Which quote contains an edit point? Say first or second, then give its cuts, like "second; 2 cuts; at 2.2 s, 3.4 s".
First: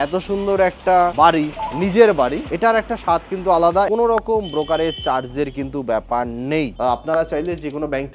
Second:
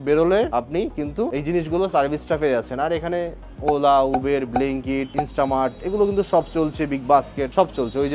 first; 2 cuts; at 3.9 s, 6.7 s